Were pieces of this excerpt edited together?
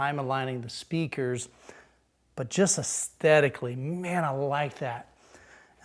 no; 0 cuts

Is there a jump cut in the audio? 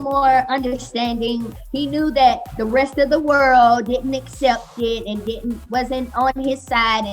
yes; 1 cut; at 1.6 s

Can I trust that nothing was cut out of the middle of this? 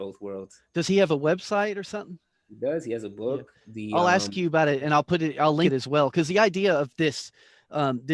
no; 1 cut; at 5.7 s

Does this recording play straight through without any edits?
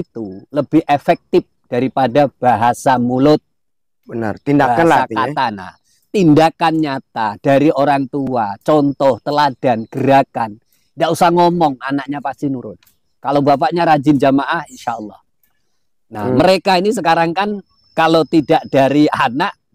yes; 0 cuts

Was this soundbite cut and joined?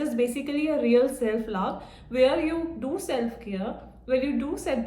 no; 0 cuts

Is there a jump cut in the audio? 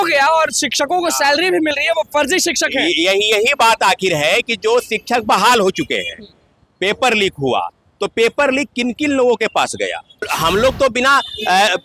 yes; 1 cut; at 10.3 s

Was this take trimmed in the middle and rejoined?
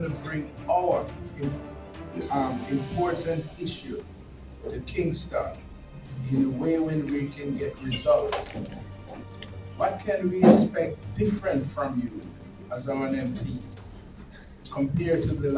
no; 0 cuts

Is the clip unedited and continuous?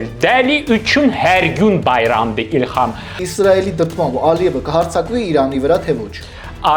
no; 1 cut; at 3.2 s

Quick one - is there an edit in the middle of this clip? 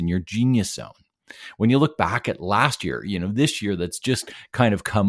no; 0 cuts

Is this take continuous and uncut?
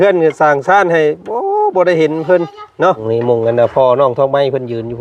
no; 1 cut; at 3.0 s

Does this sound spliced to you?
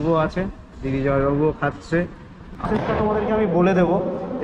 yes; 1 cut; at 2.4 s

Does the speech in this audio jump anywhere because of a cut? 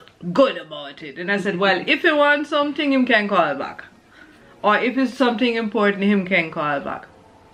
no; 0 cuts

